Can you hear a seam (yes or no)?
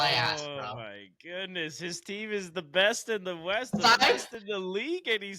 no